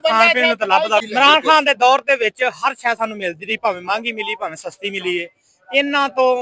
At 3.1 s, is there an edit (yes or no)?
no